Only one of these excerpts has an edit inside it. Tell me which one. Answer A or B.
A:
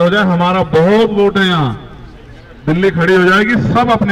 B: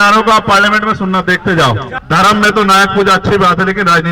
B